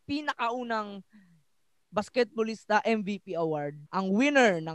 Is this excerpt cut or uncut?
cut